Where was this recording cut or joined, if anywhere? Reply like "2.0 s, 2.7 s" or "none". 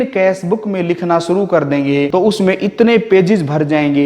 2.1 s